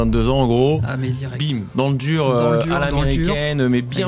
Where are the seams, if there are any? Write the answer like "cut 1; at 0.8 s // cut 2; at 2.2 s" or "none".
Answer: none